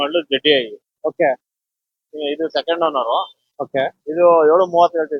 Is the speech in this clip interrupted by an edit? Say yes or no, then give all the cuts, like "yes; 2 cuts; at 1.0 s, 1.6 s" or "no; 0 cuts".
no; 0 cuts